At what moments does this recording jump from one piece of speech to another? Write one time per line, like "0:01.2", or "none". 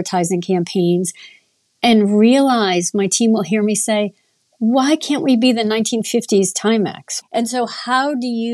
0:07.0